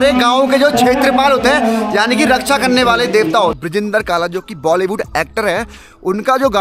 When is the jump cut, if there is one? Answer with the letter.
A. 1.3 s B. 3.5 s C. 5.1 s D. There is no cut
B